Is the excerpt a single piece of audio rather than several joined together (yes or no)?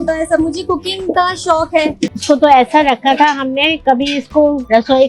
no